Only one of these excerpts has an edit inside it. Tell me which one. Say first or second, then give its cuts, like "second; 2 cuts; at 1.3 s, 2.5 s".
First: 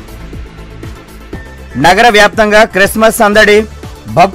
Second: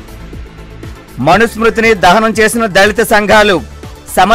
first; 1 cut; at 1.1 s